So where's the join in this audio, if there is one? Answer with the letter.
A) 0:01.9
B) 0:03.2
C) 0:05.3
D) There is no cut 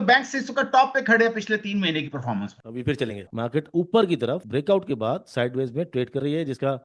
B